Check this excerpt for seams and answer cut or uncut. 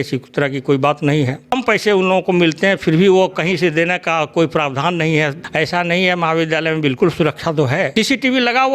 cut